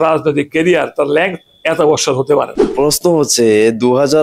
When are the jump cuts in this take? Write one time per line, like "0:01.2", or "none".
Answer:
0:02.7